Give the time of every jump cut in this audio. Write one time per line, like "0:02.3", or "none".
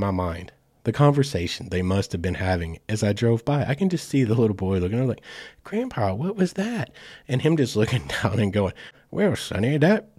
0:09.0